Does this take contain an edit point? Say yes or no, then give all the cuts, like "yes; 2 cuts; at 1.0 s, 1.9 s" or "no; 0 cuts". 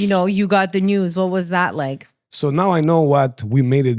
no; 0 cuts